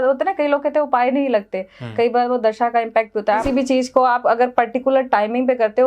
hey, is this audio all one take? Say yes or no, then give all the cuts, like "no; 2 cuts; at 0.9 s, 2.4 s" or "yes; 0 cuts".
no; 1 cut; at 3.4 s